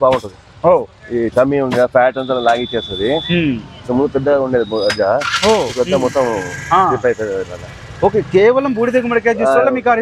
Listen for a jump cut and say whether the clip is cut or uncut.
uncut